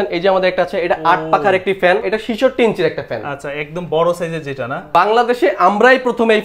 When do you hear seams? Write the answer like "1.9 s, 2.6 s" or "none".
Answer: 2.0 s, 4.9 s